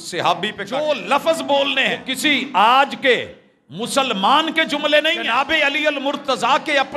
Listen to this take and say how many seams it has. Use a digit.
3